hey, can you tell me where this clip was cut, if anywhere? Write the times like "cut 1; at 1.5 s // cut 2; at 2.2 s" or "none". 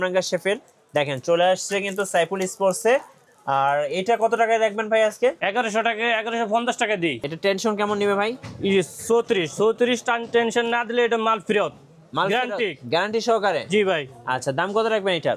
cut 1; at 5.4 s // cut 2; at 7.3 s